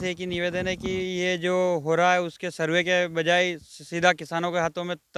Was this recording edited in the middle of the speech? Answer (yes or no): no